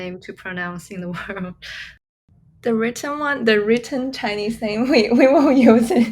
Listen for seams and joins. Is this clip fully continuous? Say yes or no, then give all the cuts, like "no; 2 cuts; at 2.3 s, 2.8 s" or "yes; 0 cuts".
no; 1 cut; at 1.7 s